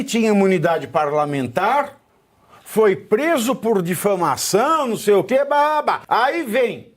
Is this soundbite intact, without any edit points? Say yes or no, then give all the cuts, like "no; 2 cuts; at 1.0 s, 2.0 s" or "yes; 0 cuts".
no; 1 cut; at 6.0 s